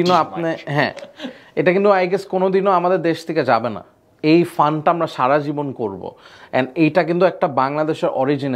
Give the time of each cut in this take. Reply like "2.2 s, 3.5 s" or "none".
none